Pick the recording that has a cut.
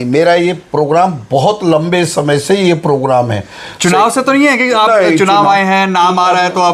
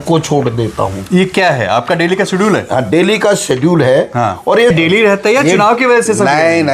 second; 1 cut; at 4.7 s

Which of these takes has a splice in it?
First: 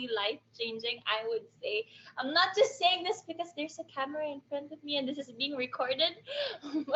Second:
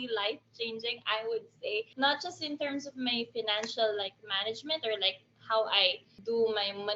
second; 1 cut; at 1.9 s

